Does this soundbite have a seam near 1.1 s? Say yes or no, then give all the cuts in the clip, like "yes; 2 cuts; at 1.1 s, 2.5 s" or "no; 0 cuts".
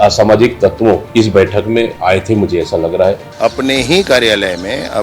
yes; 3 cuts; at 1.1 s, 2.0 s, 3.3 s